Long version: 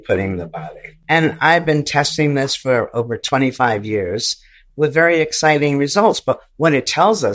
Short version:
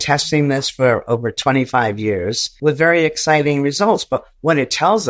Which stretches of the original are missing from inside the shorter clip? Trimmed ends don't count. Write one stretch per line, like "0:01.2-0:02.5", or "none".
0:04.3-0:04.6